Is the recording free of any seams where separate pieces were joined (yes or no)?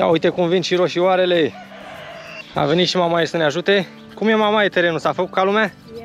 yes